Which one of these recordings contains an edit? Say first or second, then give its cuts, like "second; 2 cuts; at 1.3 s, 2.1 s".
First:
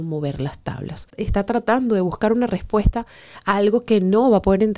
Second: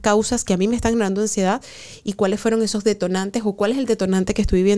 first; 1 cut; at 1.1 s